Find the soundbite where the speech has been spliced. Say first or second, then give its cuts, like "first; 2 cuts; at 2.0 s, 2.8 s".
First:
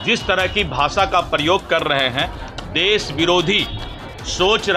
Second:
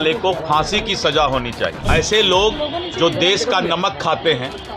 second; 1 cut; at 1.8 s